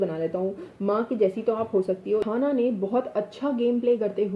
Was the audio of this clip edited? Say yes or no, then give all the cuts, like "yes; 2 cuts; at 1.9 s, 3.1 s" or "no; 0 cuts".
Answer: yes; 1 cut; at 2.2 s